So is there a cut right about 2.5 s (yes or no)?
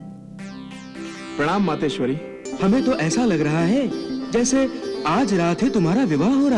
yes